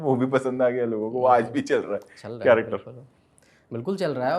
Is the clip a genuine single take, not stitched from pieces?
yes; 0 cuts

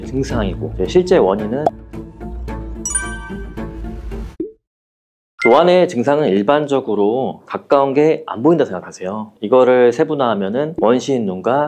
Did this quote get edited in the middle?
yes; 1 cut; at 1.4 s

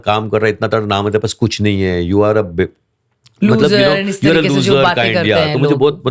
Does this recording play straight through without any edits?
yes; 0 cuts

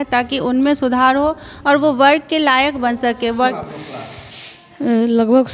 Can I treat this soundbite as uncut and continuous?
no; 1 cut; at 3.6 s

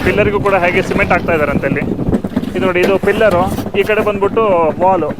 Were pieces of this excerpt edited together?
no; 0 cuts

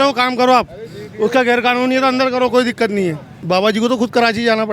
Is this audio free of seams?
no; 1 cut; at 3.3 s

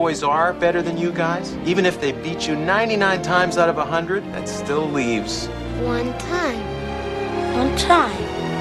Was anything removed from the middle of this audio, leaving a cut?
yes; 2 cuts; at 1.5 s, 4.3 s

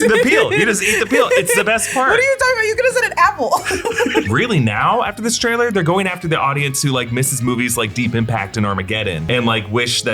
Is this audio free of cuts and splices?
no; 2 cuts; at 4.3 s, 9.2 s

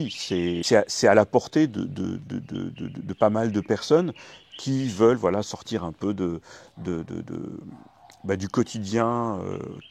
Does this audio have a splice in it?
no; 0 cuts

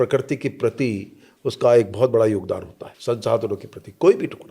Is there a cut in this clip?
no; 0 cuts

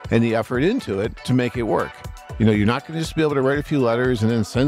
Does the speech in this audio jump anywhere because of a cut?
yes; 2 cuts; at 1.2 s, 2.3 s

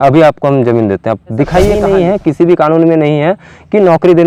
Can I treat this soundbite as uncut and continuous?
no; 1 cut; at 1.8 s

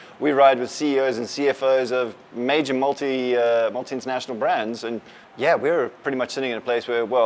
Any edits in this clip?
yes; 1 cut; at 5.2 s

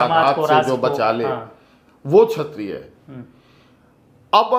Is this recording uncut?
yes; 0 cuts

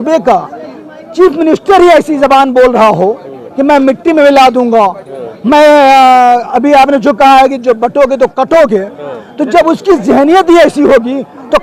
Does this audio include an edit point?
no; 0 cuts

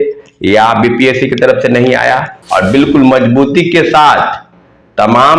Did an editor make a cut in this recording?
yes; 1 cut; at 2.4 s

